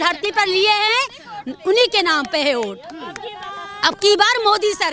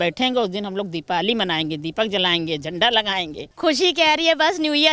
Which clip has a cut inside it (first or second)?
second